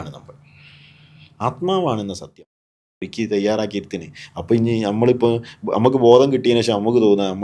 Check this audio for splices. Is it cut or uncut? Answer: cut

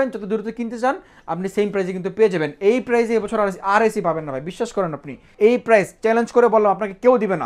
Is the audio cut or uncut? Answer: cut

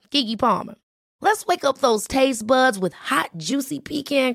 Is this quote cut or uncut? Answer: uncut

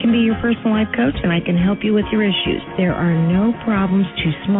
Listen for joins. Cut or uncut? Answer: uncut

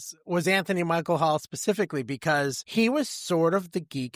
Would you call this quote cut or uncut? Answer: cut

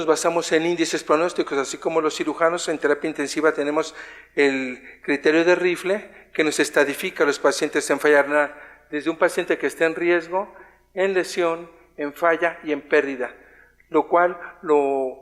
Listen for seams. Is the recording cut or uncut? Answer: uncut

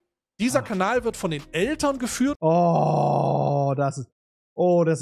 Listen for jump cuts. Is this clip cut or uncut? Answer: cut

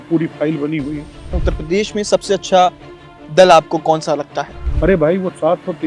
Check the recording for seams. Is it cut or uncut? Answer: cut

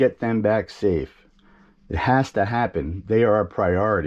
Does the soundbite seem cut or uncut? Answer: uncut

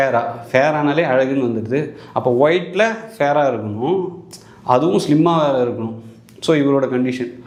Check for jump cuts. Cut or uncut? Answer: uncut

